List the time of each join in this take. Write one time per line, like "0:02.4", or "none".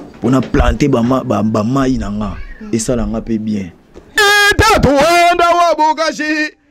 0:04.2